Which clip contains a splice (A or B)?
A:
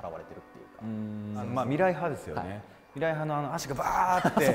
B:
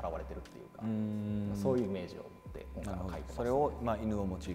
A